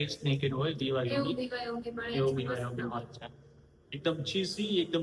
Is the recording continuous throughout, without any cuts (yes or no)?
yes